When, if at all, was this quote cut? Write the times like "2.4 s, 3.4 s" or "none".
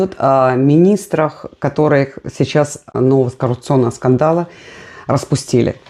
2.9 s